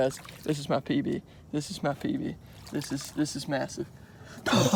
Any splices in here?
no; 0 cuts

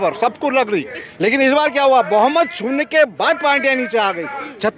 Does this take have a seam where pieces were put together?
yes; 1 cut; at 0.9 s

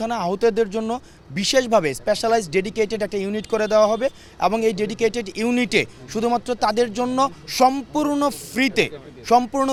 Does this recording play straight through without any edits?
yes; 0 cuts

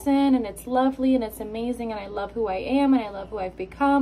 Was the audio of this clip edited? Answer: no; 0 cuts

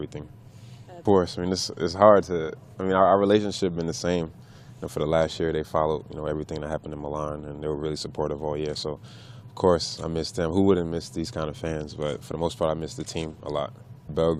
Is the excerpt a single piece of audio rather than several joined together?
no; 1 cut; at 4.7 s

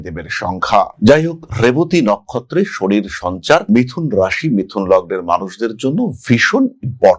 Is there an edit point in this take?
no; 0 cuts

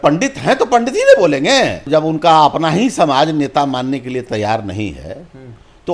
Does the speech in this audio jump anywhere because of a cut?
yes; 1 cut; at 1.9 s

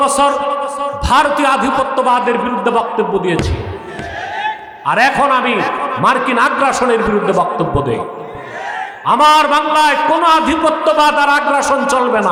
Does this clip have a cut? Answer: no; 0 cuts

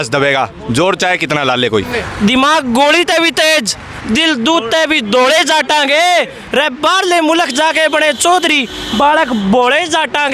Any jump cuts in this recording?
yes; 1 cut; at 1.9 s

